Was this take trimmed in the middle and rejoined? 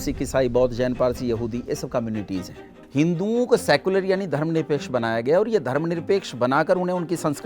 yes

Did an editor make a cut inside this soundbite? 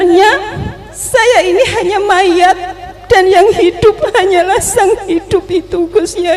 no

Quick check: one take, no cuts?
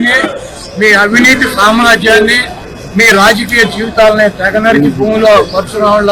yes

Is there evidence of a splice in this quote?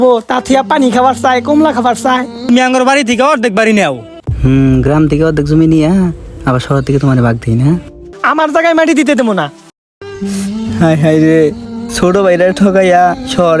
yes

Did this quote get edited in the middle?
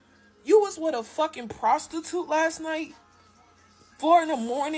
no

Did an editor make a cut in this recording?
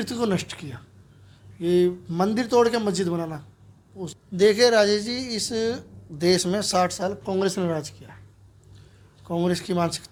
no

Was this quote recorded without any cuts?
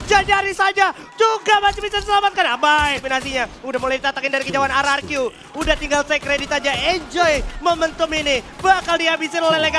no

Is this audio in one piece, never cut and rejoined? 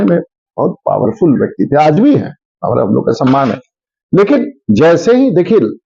yes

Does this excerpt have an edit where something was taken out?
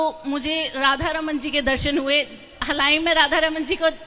no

